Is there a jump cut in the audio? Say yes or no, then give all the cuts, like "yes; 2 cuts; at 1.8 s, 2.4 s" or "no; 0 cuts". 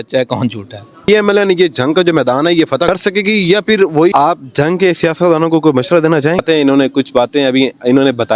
yes; 4 cuts; at 1.1 s, 2.9 s, 4.1 s, 6.4 s